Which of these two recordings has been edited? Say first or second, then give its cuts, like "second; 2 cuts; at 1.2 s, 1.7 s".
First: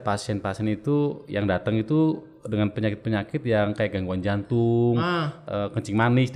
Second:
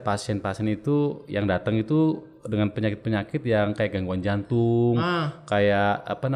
first; 1 cut; at 5.4 s